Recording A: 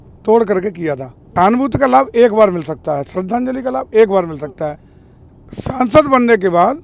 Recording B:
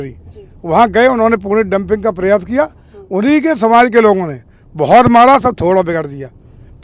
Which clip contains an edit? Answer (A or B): A